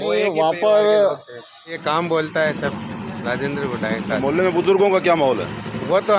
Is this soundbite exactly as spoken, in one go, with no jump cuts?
no; 1 cut; at 1.8 s

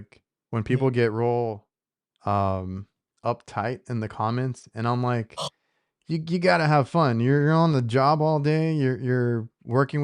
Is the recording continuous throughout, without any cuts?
yes; 0 cuts

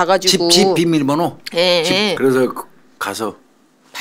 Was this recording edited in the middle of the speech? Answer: yes; 1 cut; at 2.1 s

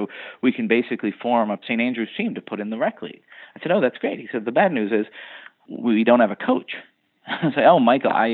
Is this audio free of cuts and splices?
no; 2 cuts; at 1.6 s, 5.7 s

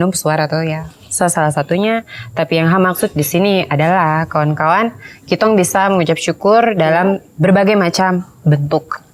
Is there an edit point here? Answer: no; 0 cuts

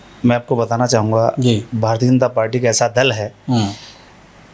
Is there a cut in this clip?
no; 0 cuts

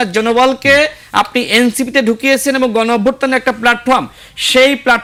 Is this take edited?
no; 0 cuts

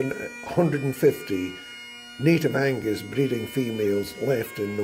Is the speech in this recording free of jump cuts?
yes; 0 cuts

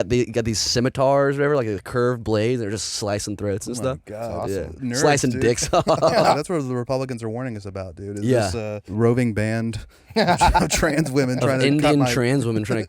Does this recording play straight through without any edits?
no; 2 cuts; at 6.3 s, 8.8 s

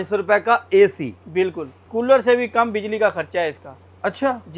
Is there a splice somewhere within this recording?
yes; 1 cut; at 1.8 s

